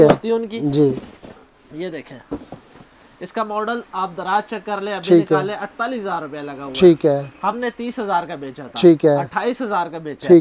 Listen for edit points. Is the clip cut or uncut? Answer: uncut